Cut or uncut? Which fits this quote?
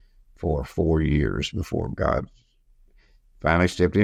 uncut